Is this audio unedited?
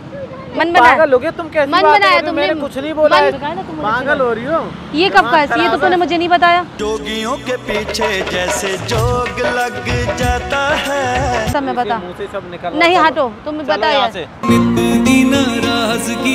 no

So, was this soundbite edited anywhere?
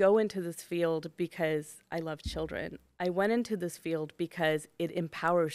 no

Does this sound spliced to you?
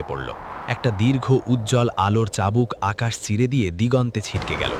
no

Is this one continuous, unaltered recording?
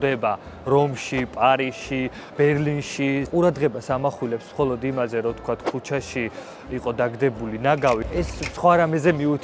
no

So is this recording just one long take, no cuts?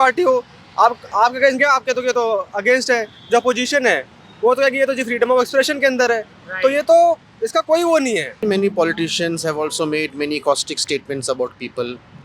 no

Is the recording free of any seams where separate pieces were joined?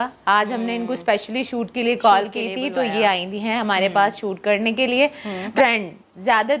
no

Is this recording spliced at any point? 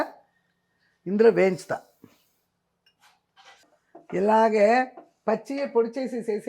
yes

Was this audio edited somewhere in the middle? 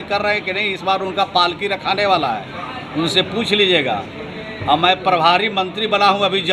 no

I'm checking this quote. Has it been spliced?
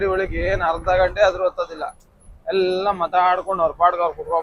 no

